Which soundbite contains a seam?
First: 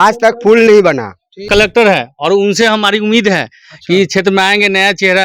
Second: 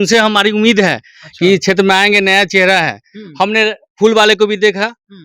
first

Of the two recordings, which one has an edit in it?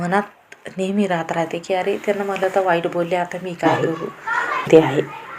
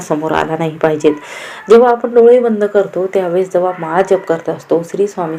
first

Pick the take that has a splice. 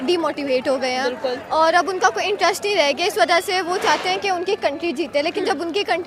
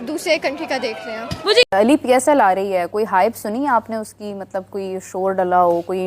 second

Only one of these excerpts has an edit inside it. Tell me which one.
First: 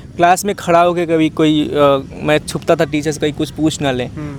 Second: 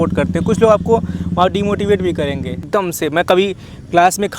second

